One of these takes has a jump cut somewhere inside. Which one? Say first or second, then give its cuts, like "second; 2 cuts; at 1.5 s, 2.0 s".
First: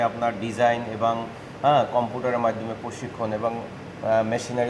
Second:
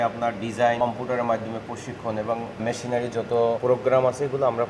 second; 3 cuts; at 0.8 s, 2.6 s, 3.6 s